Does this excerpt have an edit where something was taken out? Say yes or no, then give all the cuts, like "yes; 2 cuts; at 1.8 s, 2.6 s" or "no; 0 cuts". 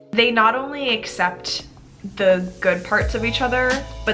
no; 0 cuts